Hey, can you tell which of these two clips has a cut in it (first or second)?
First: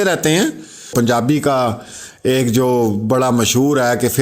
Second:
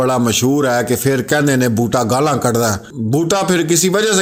first